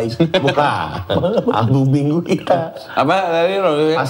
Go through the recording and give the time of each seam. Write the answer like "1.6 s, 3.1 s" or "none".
none